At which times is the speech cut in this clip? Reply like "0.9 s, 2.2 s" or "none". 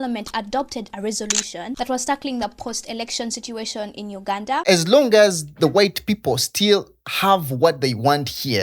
4.5 s